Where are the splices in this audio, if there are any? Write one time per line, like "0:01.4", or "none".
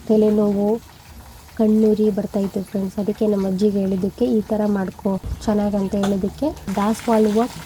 0:06.7